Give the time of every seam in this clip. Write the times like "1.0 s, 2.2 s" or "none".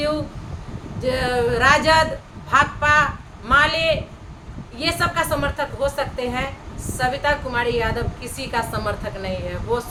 none